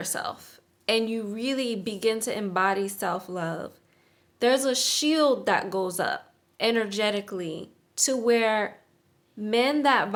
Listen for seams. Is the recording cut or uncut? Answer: uncut